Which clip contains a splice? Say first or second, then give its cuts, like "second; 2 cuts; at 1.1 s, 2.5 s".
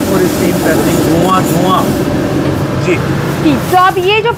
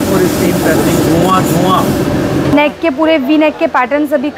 second; 1 cut; at 2.5 s